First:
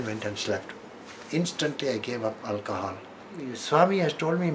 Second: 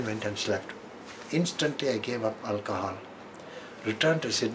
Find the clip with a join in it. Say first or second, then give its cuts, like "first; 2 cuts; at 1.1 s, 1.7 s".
first; 1 cut; at 3.6 s